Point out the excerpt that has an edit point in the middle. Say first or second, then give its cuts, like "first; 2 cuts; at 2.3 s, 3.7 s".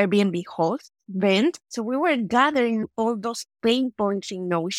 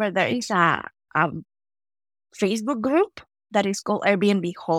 first; 2 cuts; at 1.6 s, 2.9 s